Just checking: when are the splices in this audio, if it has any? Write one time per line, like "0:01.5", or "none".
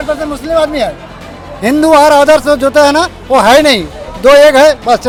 none